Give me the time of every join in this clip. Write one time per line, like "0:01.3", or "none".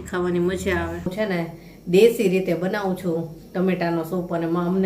0:01.1